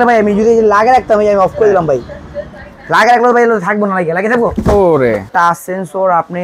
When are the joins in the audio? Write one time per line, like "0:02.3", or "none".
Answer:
0:05.3